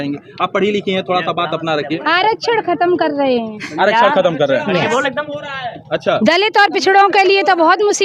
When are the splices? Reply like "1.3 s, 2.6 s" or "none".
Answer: none